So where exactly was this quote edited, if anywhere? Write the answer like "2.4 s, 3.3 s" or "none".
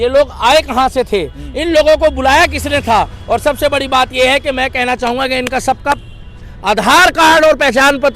none